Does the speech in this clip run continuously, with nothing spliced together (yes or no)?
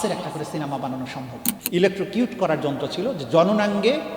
no